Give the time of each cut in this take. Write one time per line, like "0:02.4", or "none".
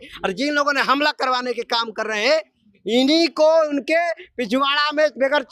none